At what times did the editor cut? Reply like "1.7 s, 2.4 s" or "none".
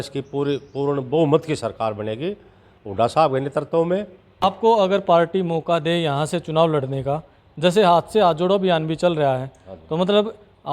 4.4 s